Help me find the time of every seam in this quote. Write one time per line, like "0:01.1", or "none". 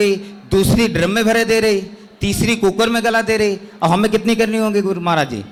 none